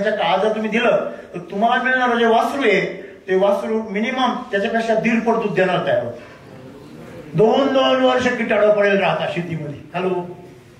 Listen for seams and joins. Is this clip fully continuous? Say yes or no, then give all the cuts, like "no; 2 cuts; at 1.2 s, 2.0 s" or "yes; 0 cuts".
no; 1 cut; at 6.2 s